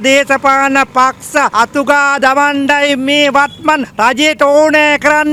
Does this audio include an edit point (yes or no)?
no